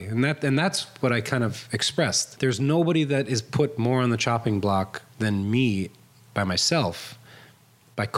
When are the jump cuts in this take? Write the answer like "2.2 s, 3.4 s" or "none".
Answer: 2.2 s, 5.0 s